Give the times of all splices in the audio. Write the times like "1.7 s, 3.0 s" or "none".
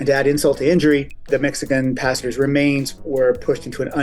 1.3 s, 3.0 s